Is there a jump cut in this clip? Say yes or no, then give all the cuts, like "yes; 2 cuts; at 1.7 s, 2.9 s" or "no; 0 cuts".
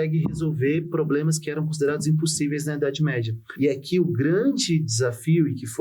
yes; 1 cut; at 3.4 s